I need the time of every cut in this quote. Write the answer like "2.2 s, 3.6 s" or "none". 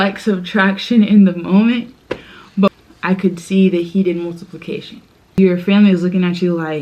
2.7 s, 5.3 s